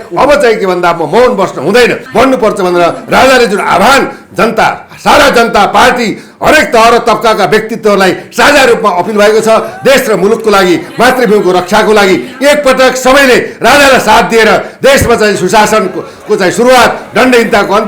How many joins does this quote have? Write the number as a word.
one